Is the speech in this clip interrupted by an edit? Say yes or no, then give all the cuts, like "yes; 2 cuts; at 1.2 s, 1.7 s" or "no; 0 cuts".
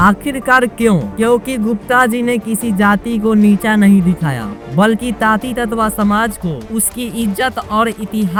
no; 0 cuts